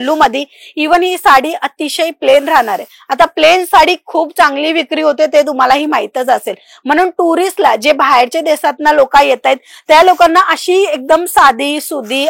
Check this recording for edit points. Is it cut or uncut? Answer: uncut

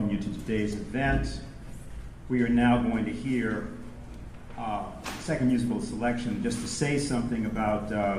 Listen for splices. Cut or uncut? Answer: uncut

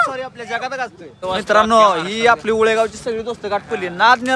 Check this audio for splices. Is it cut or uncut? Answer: cut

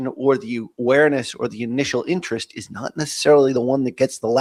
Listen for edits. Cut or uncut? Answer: uncut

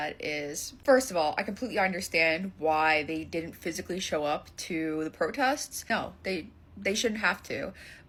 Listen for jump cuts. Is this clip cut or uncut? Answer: uncut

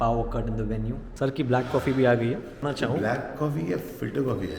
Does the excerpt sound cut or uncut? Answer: cut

